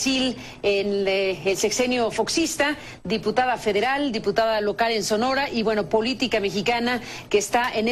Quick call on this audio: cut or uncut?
uncut